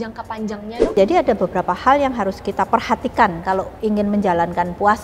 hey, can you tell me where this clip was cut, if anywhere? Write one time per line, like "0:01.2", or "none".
0:00.9
0:03.7